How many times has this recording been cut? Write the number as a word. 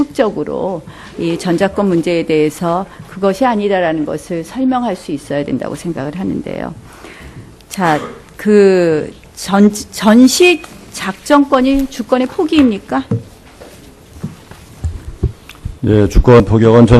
one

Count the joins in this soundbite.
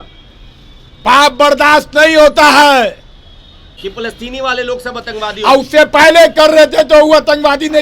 one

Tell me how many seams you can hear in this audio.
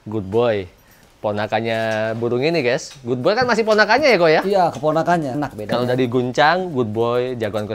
one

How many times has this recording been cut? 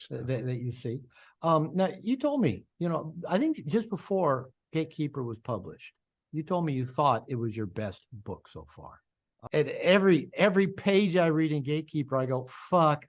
one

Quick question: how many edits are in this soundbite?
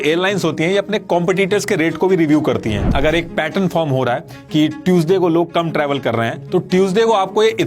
one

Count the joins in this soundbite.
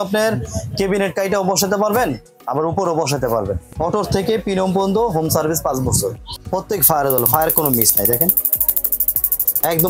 two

